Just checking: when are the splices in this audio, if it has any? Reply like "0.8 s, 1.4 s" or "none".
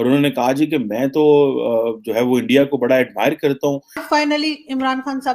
4.0 s